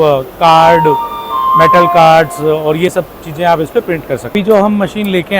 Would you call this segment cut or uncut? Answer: cut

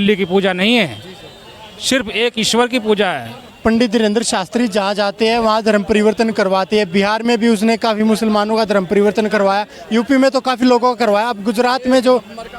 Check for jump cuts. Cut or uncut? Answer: uncut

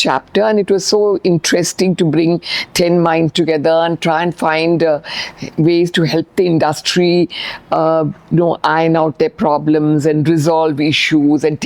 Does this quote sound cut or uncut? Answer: uncut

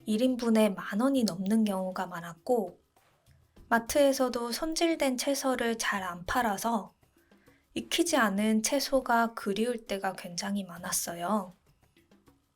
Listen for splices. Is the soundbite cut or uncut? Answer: cut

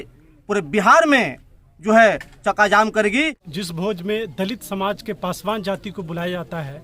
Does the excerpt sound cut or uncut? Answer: cut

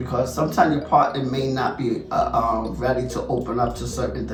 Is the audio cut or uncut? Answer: uncut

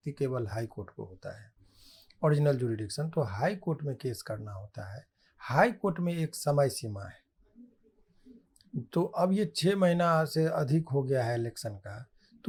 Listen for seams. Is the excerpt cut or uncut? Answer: uncut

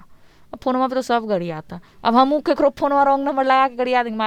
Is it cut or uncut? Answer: uncut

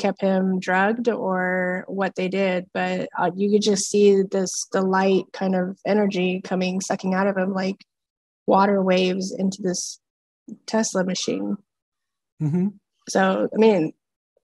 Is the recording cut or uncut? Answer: uncut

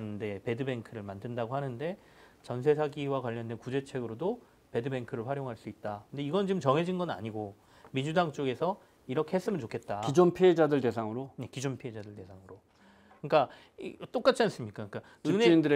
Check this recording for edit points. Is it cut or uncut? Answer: uncut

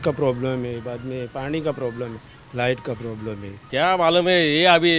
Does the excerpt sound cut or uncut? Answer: uncut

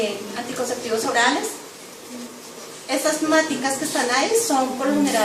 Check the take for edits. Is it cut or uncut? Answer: uncut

